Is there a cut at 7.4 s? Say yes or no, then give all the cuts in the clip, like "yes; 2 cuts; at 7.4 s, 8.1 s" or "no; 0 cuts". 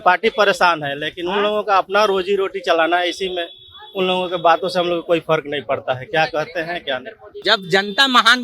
yes; 1 cut; at 7.4 s